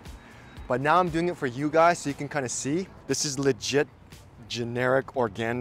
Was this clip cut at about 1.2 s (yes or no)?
no